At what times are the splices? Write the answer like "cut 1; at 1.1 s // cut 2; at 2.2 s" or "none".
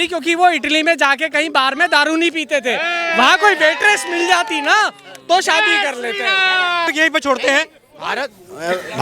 cut 1; at 6.9 s